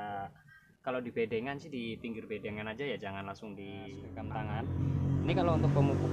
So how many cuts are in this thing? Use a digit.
1